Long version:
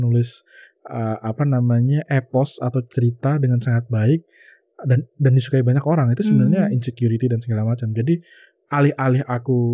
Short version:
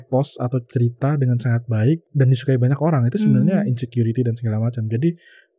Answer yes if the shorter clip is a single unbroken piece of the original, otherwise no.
no